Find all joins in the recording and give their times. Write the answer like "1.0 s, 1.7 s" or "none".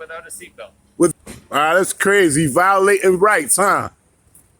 1.1 s